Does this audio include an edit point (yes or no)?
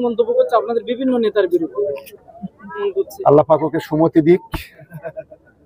yes